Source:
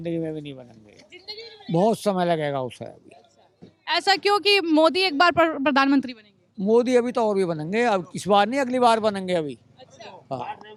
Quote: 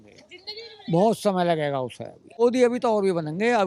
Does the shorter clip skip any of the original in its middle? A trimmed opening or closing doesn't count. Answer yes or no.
yes